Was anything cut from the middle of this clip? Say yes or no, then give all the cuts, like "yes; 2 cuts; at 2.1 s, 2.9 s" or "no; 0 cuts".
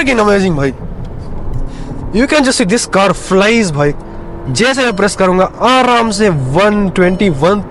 yes; 1 cut; at 1.5 s